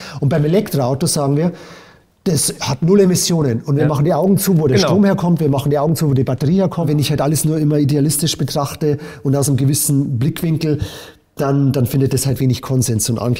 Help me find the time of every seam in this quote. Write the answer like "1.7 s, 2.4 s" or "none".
6.9 s